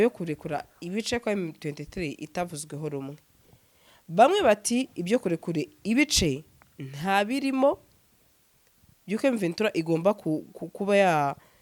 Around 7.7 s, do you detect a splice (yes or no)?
no